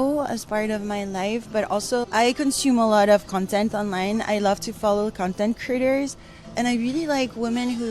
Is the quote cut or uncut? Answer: cut